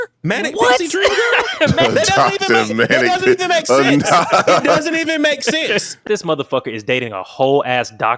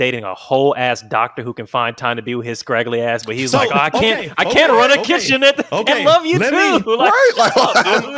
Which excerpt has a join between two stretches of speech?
first; 2 cuts; at 1.8 s, 6.0 s

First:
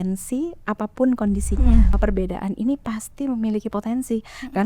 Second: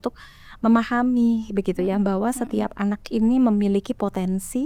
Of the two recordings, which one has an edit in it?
first; 1 cut; at 1.9 s

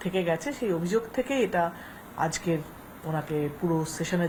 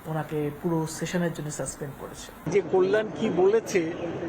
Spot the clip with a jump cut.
second; 1 cut; at 2.5 s

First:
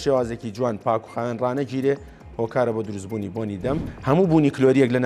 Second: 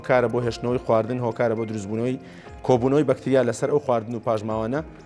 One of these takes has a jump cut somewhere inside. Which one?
first; 1 cut; at 3.9 s

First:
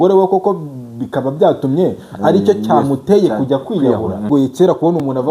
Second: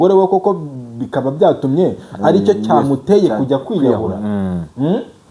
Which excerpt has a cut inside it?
first; 1 cut; at 4.3 s

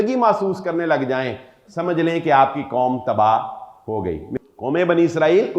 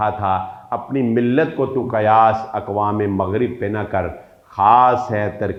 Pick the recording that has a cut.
first; 1 cut; at 4.3 s

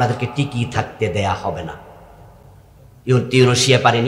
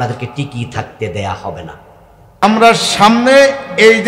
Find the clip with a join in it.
second; 1 cut; at 2.4 s

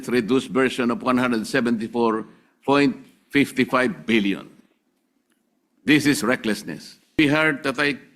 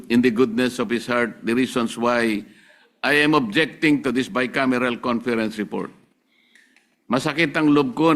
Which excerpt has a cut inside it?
first; 1 cut; at 7.2 s

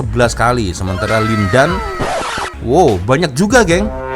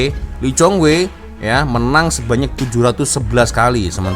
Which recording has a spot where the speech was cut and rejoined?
first; 1 cut; at 2.5 s

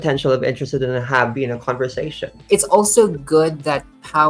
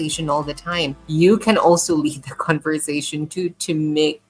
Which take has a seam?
first; 1 cut; at 2.3 s

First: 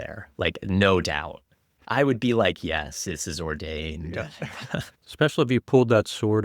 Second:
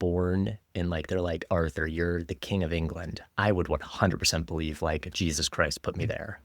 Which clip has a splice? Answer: first; 1 cut; at 1.7 s

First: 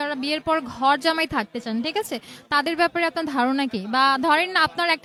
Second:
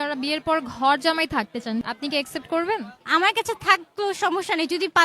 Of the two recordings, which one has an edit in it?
second; 2 cuts; at 1.8 s, 3.0 s

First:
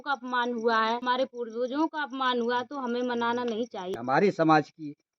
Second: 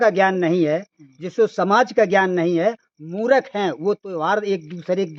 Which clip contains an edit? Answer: first; 2 cuts; at 1.0 s, 4.0 s

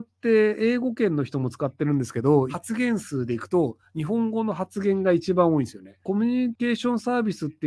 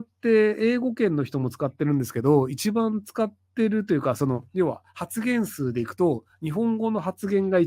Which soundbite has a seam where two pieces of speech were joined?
first; 2 cuts; at 2.5 s, 6.2 s

